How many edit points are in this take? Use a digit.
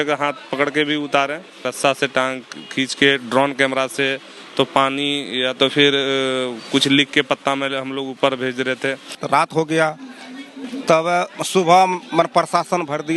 2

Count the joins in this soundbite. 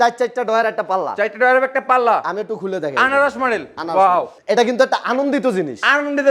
1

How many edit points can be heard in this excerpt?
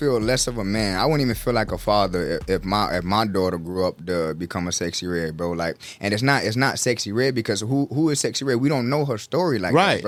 0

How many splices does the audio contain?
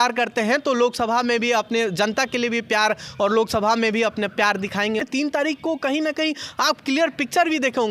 1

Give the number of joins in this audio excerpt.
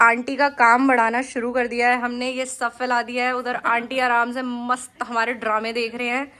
0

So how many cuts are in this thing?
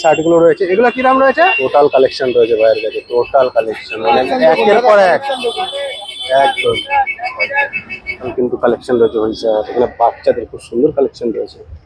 2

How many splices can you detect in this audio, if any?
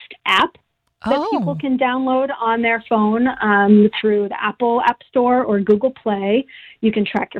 0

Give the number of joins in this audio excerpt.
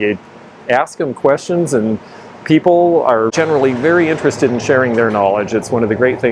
1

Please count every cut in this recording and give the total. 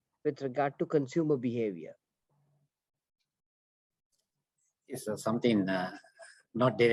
0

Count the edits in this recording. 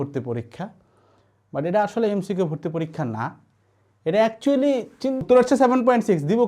1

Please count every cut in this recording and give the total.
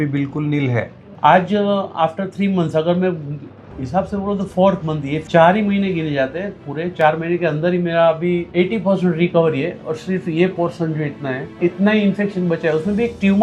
4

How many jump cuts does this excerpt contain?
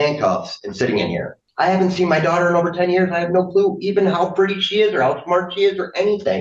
1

